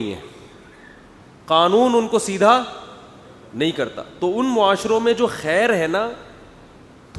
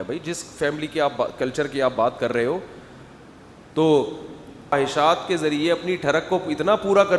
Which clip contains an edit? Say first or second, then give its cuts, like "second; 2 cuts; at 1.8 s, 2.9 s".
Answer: second; 1 cut; at 4.7 s